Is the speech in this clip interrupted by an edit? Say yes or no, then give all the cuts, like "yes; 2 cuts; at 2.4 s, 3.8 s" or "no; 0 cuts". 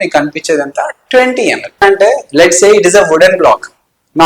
yes; 1 cut; at 1.8 s